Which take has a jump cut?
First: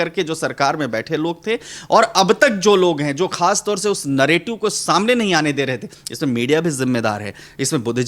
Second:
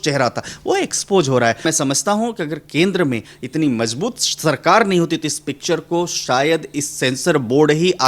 second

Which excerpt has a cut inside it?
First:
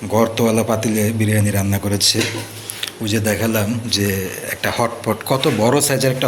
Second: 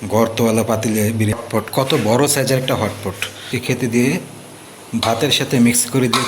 second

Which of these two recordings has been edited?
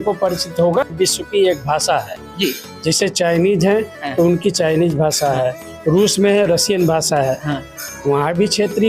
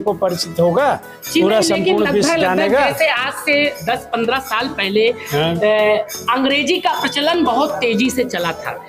first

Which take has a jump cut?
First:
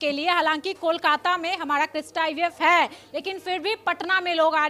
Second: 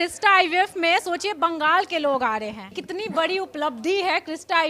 second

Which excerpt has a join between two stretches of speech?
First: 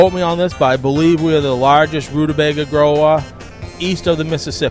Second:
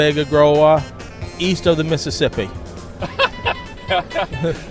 second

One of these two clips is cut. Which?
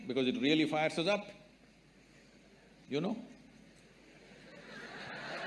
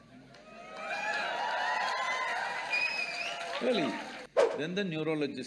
second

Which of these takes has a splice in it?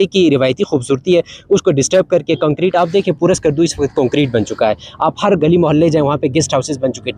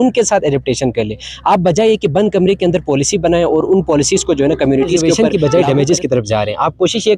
second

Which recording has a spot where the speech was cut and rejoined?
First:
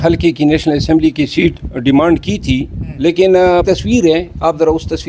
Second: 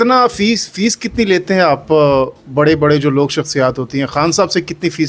first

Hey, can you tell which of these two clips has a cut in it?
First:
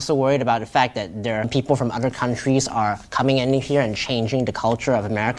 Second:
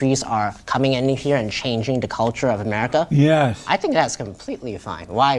first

